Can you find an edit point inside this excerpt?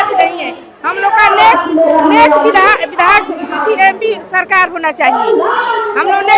no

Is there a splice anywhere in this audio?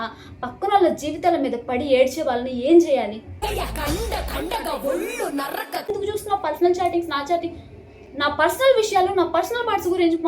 yes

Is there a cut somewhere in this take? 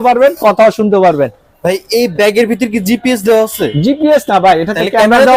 no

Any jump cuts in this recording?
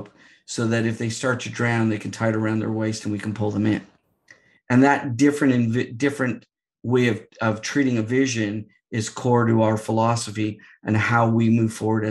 no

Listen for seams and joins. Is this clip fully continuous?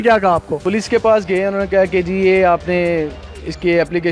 yes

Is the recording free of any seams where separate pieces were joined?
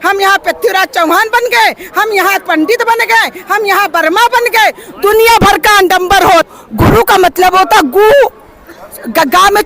no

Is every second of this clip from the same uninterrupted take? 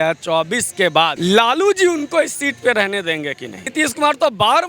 no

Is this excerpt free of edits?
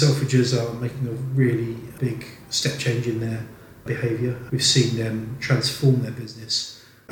yes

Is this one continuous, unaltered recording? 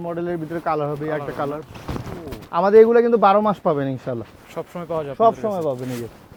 yes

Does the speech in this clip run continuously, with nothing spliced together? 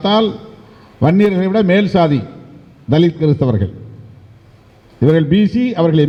yes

